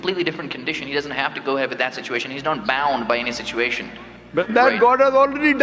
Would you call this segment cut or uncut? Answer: cut